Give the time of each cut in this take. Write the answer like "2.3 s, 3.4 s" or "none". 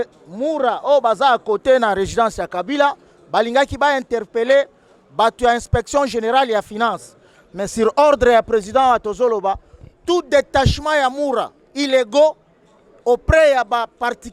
none